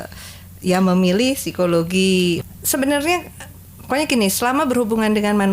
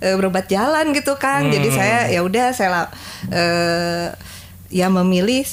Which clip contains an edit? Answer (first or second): first